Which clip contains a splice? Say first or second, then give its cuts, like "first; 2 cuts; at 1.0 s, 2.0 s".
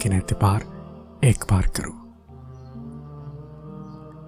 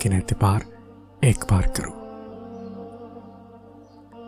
second; 1 cut; at 1.9 s